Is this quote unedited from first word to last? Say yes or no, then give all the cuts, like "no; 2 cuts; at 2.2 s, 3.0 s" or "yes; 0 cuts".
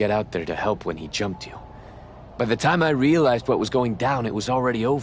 yes; 0 cuts